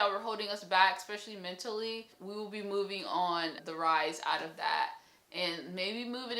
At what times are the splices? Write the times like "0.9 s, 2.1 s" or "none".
2.2 s, 3.6 s